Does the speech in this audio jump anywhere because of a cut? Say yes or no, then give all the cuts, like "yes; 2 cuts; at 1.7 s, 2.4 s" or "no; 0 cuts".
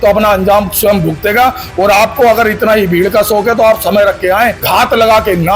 yes; 1 cut; at 4.6 s